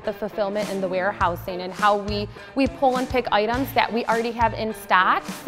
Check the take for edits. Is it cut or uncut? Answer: uncut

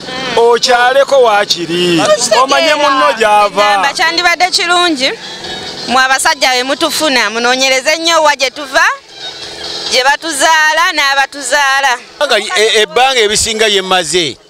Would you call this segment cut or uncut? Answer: cut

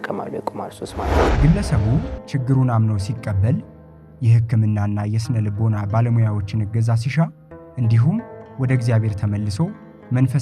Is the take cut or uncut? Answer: cut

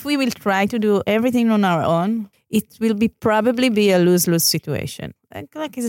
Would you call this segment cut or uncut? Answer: cut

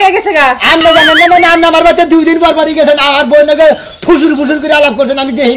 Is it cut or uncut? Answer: uncut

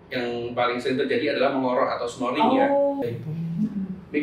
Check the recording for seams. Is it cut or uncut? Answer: cut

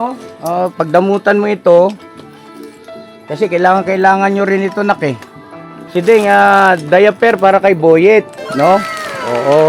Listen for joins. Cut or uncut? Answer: uncut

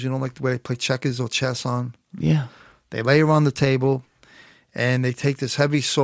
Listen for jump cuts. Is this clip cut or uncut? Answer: uncut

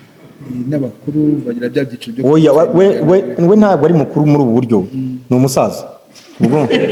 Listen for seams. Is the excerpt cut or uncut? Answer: uncut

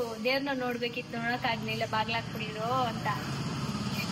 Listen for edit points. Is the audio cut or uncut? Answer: uncut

